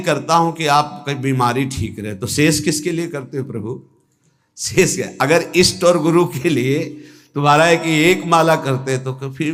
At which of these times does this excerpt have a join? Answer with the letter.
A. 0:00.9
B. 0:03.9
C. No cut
C